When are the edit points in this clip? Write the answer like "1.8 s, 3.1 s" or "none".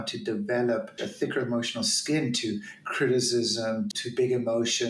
1.0 s, 3.9 s